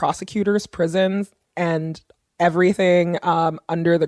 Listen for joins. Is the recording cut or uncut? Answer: uncut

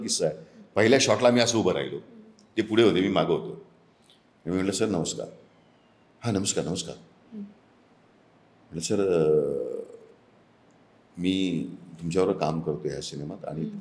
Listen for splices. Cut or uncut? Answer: uncut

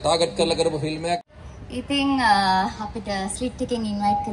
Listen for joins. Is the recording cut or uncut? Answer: cut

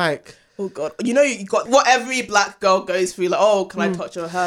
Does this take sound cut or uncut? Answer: cut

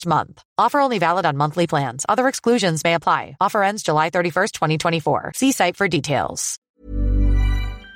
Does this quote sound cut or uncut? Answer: cut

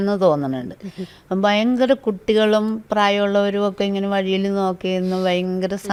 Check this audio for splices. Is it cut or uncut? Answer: uncut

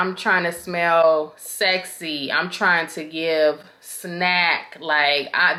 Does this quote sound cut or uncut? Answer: uncut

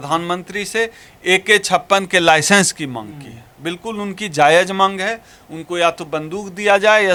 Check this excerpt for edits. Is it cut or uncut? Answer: uncut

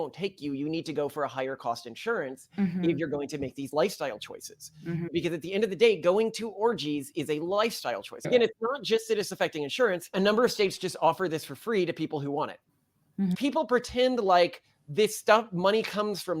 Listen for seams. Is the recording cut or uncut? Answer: cut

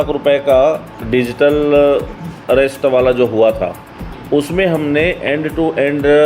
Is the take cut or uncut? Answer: cut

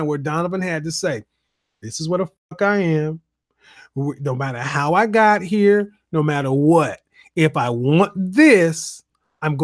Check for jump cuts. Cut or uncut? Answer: uncut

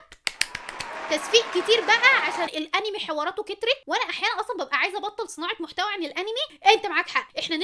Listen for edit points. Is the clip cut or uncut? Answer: cut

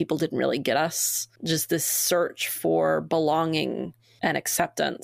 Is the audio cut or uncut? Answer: cut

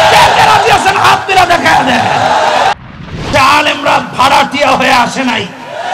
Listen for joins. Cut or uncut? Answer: cut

